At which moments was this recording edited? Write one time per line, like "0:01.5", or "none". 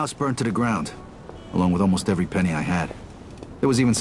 0:02.3